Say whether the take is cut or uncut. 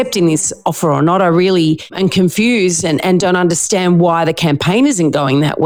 uncut